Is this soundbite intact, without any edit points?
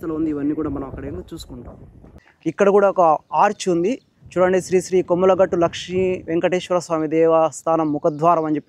no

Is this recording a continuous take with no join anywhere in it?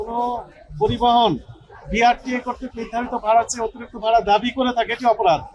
yes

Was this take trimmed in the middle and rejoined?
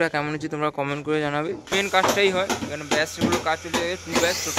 yes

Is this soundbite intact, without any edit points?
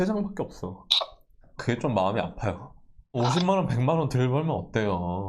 no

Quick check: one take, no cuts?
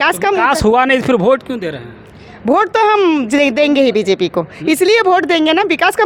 yes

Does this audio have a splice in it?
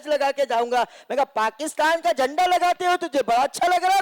no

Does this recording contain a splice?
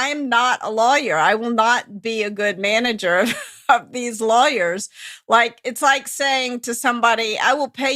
no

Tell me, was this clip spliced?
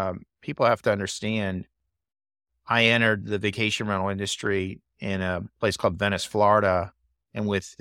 no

